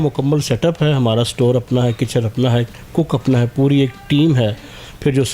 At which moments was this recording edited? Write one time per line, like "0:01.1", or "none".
none